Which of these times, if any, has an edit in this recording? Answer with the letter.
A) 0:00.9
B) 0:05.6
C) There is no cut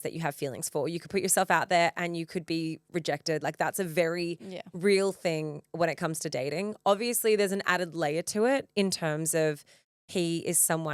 C